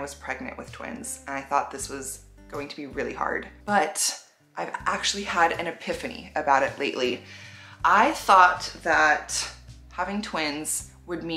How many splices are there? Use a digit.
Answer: 0